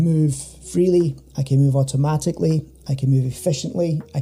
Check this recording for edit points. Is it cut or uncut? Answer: uncut